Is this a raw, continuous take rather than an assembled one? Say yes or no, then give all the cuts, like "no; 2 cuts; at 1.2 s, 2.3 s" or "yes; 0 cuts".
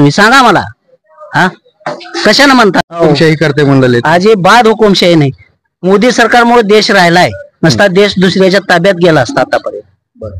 no; 1 cut; at 2.9 s